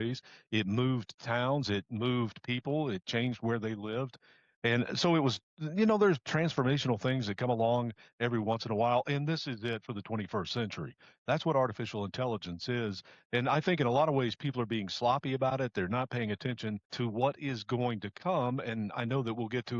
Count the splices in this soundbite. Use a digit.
1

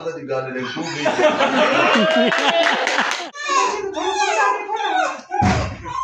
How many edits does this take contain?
1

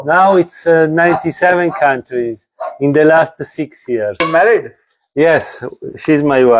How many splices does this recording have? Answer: 1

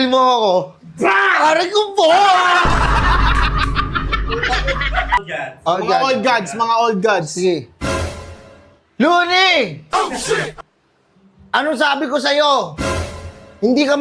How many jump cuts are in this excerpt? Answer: 1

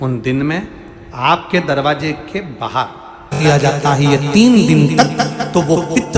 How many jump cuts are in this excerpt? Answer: 1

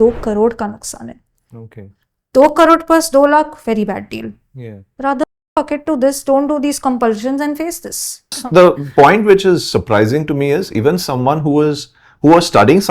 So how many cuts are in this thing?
1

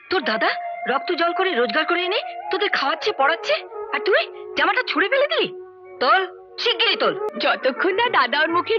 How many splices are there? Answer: 1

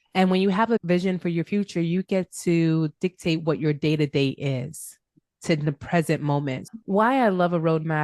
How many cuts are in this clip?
1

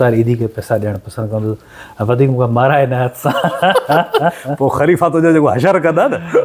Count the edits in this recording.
0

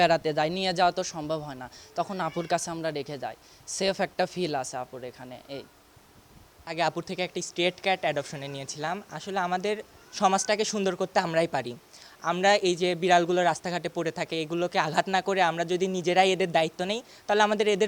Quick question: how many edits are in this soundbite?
1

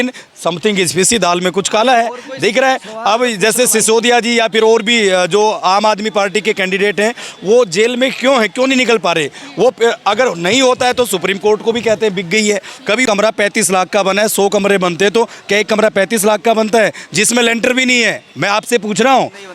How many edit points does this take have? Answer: 1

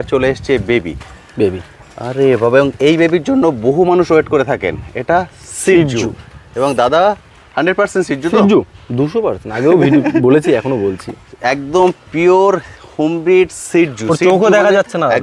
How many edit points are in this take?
0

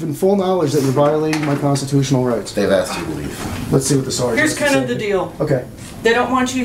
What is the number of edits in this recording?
1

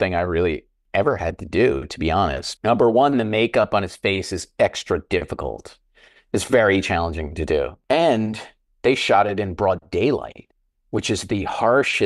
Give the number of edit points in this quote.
2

